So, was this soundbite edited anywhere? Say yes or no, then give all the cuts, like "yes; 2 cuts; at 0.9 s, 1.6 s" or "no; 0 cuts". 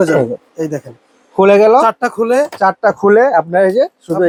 no; 0 cuts